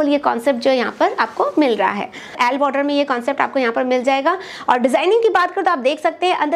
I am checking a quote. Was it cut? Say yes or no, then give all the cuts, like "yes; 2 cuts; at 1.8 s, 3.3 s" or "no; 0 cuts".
yes; 1 cut; at 2.3 s